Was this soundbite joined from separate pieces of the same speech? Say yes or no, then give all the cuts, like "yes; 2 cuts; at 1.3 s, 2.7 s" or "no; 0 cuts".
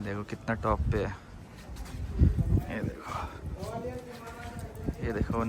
no; 0 cuts